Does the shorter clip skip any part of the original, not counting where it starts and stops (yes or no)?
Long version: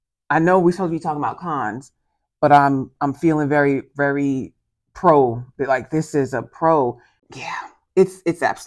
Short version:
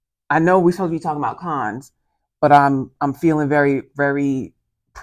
no